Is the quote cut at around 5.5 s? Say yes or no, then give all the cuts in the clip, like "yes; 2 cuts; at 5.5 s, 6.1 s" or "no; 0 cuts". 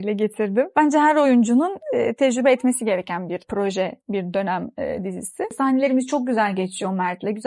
yes; 3 cuts; at 0.7 s, 3.5 s, 5.5 s